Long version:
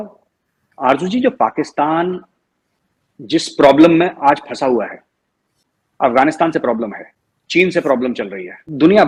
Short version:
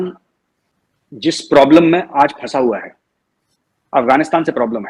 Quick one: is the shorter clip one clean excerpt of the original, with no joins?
yes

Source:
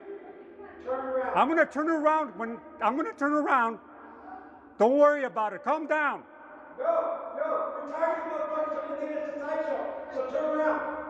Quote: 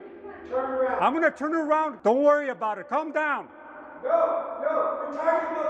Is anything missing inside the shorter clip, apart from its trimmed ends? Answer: yes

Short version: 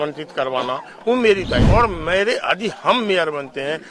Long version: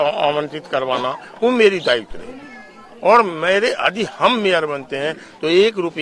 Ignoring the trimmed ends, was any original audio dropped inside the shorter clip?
yes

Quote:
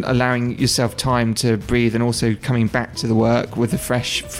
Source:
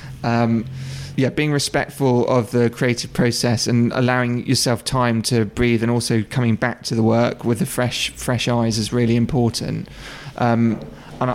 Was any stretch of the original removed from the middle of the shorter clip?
no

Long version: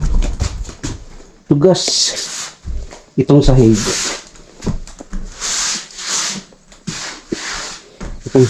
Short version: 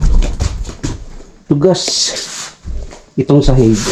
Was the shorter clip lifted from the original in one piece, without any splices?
yes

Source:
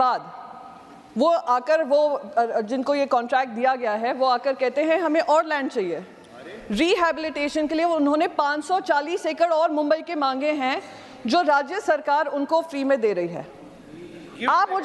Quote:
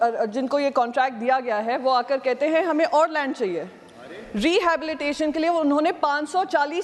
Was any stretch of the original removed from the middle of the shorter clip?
no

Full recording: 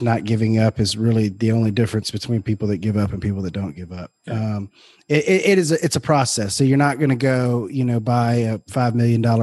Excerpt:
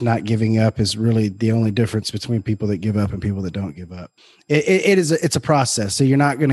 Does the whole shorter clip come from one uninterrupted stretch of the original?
no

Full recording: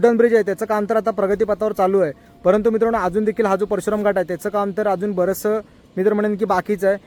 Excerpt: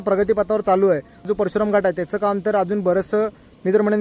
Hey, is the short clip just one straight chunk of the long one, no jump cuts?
no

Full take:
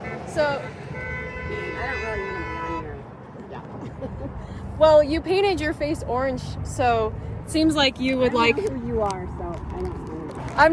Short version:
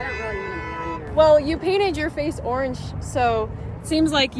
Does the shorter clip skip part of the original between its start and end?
yes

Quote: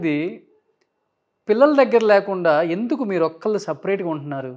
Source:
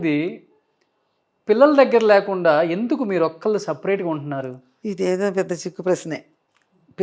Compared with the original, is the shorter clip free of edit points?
yes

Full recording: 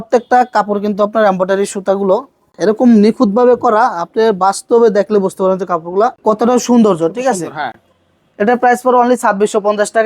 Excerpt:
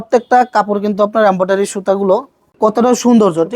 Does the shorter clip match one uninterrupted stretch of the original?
no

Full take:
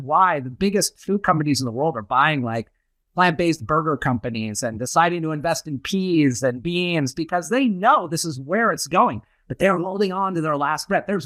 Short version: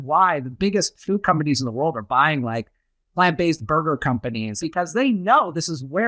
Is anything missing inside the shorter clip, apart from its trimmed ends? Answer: yes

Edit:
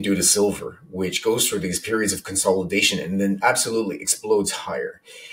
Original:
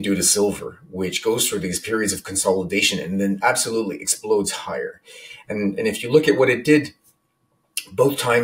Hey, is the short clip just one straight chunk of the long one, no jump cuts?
yes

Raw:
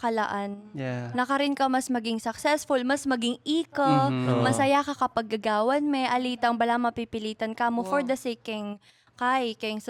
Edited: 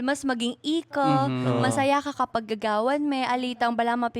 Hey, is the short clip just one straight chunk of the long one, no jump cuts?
yes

